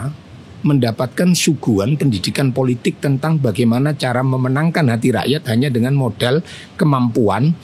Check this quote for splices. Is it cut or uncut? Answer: uncut